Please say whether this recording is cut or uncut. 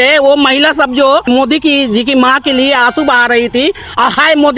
cut